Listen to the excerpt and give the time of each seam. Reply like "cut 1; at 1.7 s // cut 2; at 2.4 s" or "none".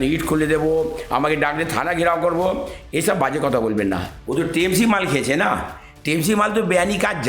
cut 1; at 4.1 s